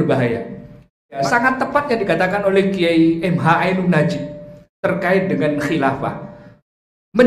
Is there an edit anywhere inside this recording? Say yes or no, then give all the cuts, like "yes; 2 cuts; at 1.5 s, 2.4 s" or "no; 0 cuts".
yes; 1 cut; at 1.2 s